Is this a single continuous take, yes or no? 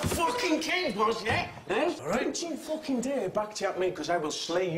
no